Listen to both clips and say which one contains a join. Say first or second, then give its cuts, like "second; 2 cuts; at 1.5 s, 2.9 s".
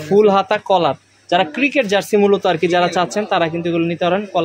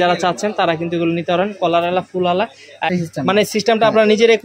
second; 1 cut; at 2.9 s